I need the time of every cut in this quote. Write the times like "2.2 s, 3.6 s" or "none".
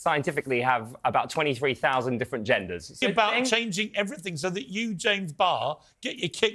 3.0 s